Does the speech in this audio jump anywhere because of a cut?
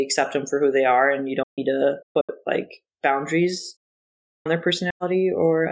no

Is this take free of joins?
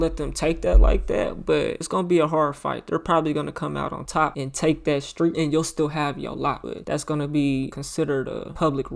no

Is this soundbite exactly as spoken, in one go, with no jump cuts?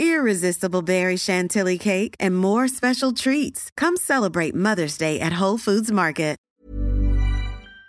no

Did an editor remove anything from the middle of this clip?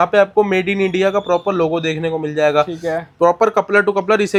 no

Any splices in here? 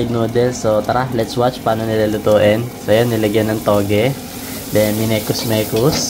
no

